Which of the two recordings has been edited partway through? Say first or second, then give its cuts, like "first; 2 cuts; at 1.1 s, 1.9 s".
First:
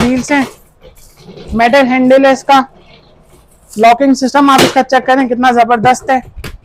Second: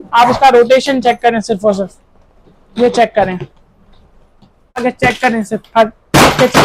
second; 1 cut; at 4.8 s